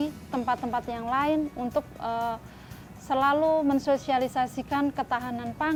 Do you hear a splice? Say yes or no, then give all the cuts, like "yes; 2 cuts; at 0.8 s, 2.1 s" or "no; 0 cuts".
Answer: no; 0 cuts